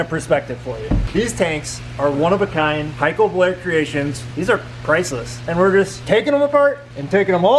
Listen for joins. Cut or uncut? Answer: cut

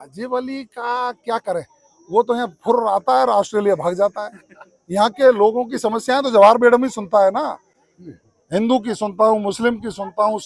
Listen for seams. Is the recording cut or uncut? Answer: uncut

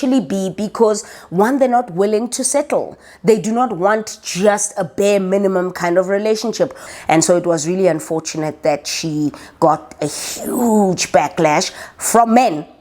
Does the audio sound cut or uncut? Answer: cut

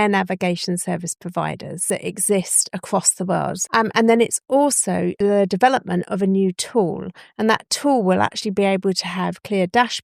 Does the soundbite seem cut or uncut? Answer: cut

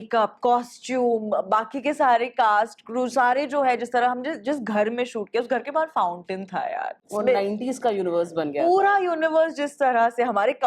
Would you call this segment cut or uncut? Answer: uncut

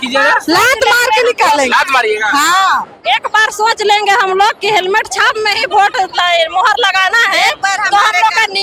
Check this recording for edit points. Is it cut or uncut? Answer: uncut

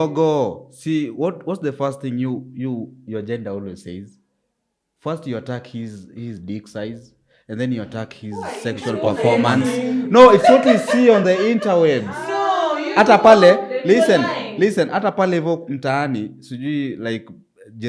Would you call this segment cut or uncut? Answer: uncut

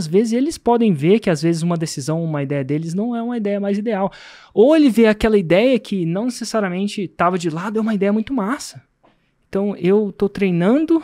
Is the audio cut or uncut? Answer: uncut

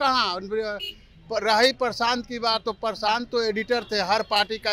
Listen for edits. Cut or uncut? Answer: uncut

